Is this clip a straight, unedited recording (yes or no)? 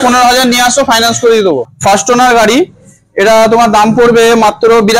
no